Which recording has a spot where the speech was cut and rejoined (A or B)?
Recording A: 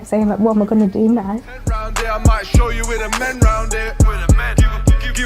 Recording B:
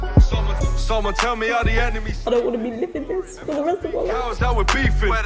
A